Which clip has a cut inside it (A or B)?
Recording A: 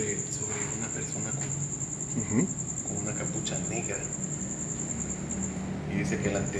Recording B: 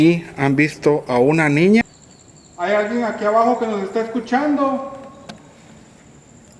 B